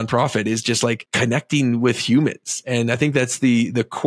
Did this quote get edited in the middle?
yes; 1 cut; at 1.1 s

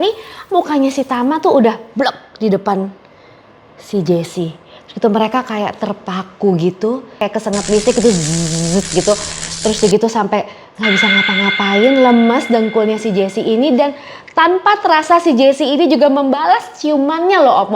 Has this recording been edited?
yes; 1 cut; at 7.2 s

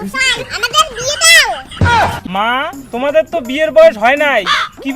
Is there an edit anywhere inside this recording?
yes; 1 cut; at 2.2 s

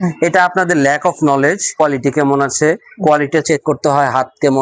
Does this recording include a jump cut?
yes; 1 cut; at 1.8 s

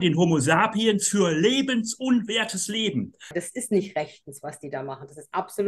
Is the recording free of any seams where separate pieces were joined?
no; 1 cut; at 3.4 s

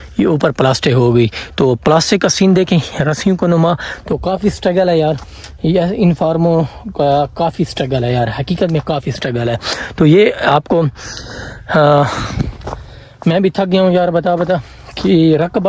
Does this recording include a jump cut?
no; 0 cuts

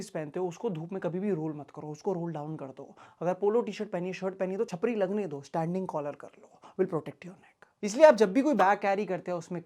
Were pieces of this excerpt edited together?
no; 0 cuts

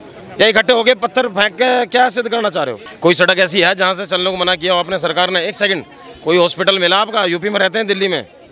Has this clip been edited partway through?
yes; 1 cut; at 2.8 s

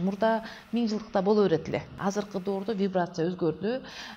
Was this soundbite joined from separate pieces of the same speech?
yes; 1 cut; at 1.9 s

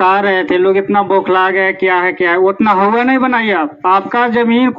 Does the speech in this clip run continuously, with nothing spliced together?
yes; 0 cuts

